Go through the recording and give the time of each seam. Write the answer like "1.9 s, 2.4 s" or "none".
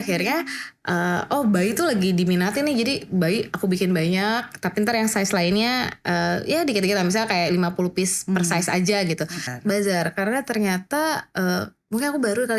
9.5 s